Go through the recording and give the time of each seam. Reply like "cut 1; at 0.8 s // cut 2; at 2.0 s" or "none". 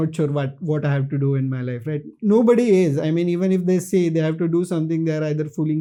none